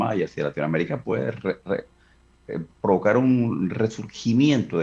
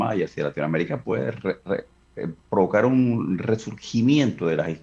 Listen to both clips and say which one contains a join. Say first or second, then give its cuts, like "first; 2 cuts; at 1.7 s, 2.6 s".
second; 1 cut; at 2.0 s